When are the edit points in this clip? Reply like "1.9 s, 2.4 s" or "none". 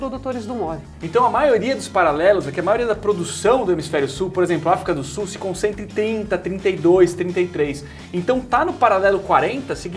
0.9 s